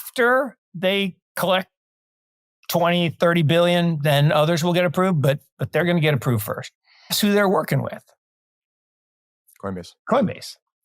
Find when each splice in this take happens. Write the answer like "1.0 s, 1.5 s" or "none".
7.2 s